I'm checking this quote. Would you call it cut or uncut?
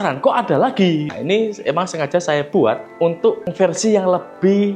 cut